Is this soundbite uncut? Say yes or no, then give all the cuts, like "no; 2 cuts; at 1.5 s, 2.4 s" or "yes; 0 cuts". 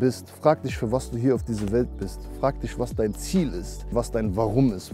no; 1 cut; at 3.9 s